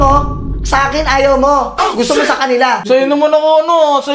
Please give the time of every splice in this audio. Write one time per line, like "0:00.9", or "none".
0:02.8

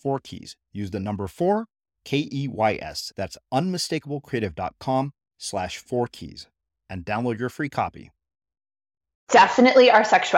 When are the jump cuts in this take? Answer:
0:09.3

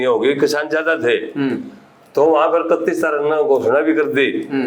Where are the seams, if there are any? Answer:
none

